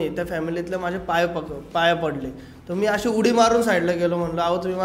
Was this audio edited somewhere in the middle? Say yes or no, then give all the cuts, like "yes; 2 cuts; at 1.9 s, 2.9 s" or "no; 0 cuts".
no; 0 cuts